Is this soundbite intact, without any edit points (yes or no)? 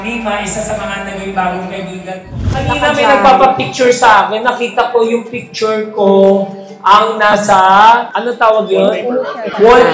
no